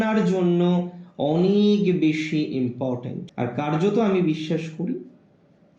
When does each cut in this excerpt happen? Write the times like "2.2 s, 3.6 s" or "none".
3.2 s

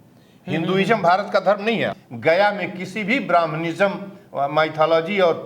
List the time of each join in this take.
1.9 s

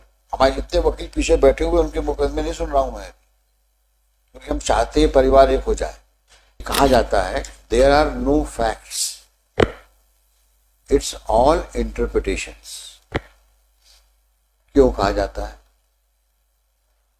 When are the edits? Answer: 6.7 s

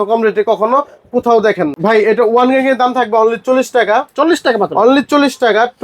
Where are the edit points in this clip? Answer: 1.7 s

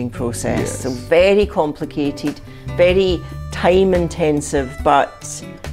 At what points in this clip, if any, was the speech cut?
none

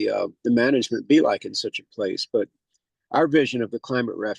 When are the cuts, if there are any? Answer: none

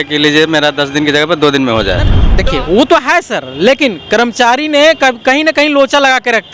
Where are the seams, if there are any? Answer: 2.2 s

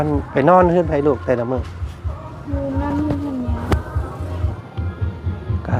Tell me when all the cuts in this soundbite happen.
4.5 s

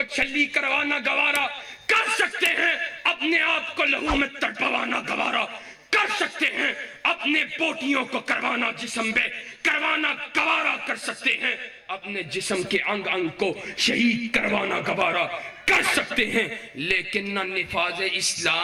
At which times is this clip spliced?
none

